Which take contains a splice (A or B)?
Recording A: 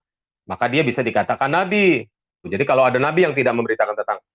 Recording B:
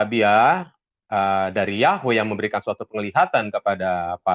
A